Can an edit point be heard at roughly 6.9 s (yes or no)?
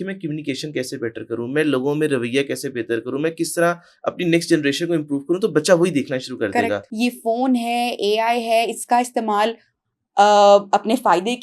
yes